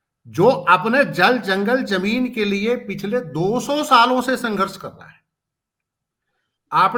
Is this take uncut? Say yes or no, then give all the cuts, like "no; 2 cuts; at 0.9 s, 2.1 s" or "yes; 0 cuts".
yes; 0 cuts